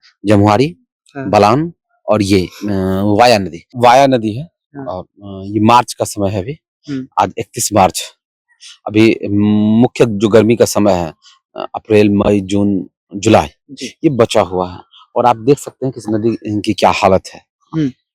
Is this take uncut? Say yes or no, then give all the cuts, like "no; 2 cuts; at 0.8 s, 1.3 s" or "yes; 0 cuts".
no; 1 cut; at 3.7 s